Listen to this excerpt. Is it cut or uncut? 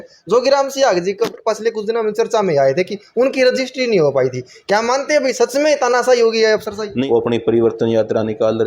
cut